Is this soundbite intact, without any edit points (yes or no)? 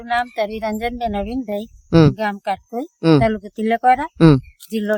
yes